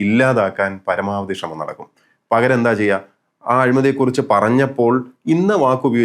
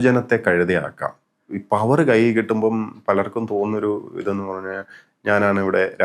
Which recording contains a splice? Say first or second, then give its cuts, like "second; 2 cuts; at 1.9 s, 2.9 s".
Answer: second; 1 cut; at 1.5 s